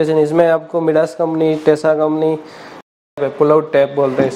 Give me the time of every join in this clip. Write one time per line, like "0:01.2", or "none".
0:03.1